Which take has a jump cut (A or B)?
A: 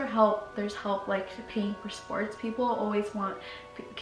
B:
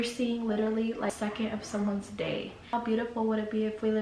B